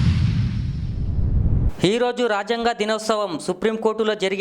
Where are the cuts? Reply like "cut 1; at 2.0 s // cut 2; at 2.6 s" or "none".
cut 1; at 1.6 s